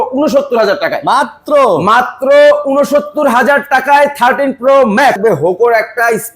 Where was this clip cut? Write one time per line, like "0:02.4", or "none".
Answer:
0:05.2